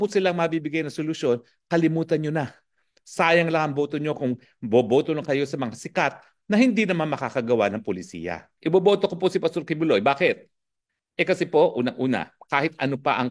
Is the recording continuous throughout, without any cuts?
no; 1 cut; at 8.4 s

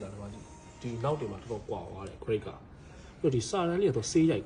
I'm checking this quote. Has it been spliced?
no; 0 cuts

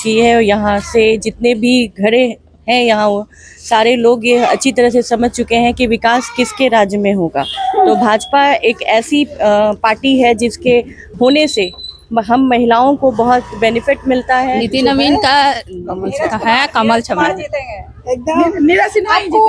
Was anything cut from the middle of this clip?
yes; 1 cut; at 14.6 s

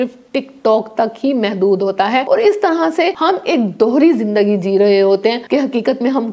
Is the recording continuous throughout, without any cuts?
no; 3 cuts; at 2.2 s, 3.2 s, 5.4 s

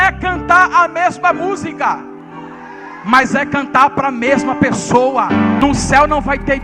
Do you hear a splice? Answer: yes; 1 cut; at 5.6 s

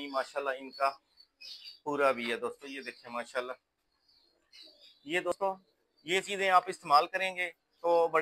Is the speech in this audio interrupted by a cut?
yes; 1 cut; at 5.3 s

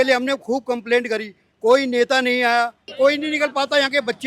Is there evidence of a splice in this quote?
yes; 1 cut; at 2.8 s

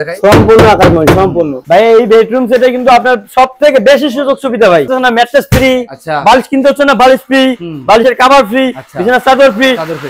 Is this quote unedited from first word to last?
no; 2 cuts; at 1.6 s, 4.9 s

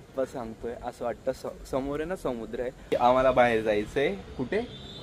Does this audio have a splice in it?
yes; 1 cut; at 2.9 s

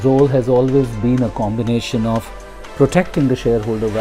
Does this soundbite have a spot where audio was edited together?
no; 0 cuts

